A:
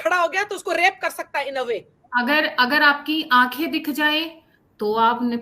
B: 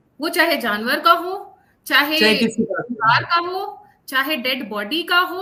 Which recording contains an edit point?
A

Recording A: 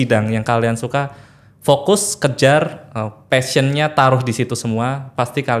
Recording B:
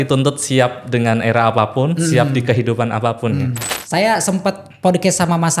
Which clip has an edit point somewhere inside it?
B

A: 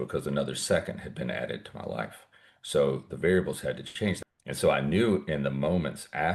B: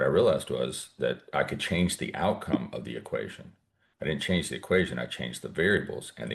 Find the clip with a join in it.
A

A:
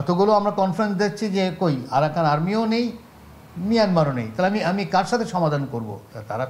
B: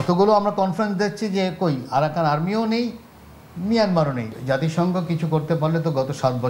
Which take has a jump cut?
B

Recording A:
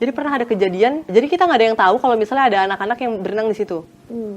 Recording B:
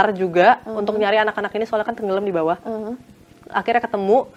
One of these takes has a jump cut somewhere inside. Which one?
A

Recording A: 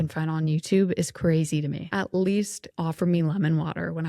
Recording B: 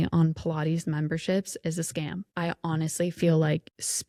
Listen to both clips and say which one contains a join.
A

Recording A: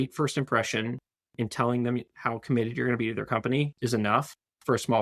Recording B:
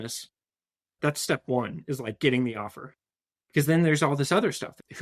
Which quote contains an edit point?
A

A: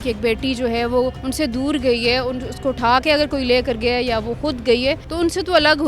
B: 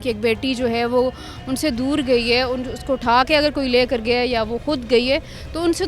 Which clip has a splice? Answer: A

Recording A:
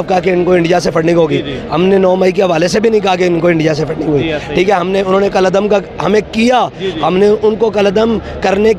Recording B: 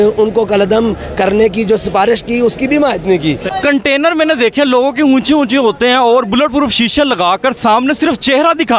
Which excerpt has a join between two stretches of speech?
B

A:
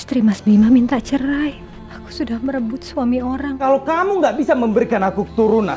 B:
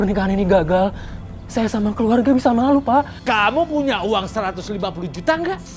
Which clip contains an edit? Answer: A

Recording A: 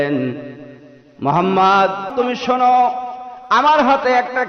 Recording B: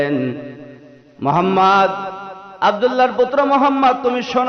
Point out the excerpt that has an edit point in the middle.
A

